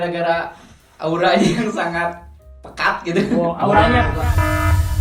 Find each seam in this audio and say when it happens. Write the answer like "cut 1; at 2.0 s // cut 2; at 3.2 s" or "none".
none